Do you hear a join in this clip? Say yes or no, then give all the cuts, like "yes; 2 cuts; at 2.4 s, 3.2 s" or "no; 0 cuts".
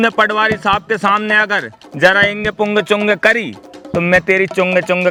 no; 0 cuts